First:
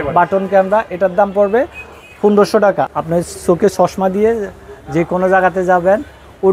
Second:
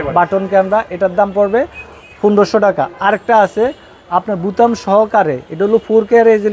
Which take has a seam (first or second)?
first